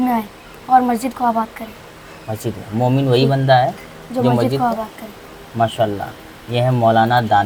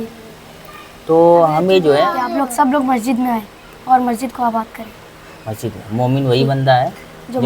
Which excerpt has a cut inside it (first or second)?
second